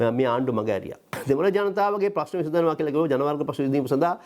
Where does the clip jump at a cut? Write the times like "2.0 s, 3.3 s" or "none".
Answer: 1.1 s